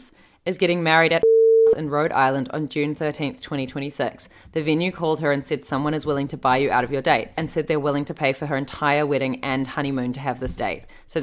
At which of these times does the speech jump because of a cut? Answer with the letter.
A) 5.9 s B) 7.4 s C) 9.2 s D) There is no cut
B